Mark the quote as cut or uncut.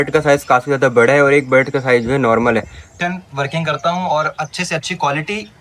cut